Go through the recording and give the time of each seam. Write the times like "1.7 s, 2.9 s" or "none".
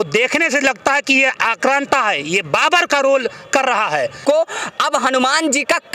4.2 s